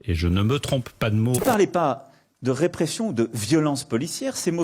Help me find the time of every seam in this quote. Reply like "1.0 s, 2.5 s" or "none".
1.4 s